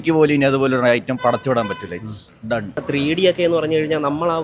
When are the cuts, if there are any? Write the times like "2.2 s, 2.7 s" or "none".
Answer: 2.8 s